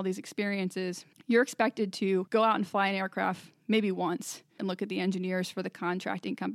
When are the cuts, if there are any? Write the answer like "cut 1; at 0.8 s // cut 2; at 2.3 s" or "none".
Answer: cut 1; at 1.1 s // cut 2; at 2.3 s // cut 3; at 4.6 s